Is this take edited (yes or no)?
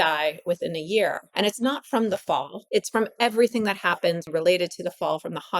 yes